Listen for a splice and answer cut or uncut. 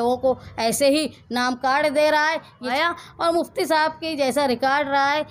cut